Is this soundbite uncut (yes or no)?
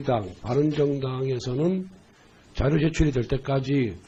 yes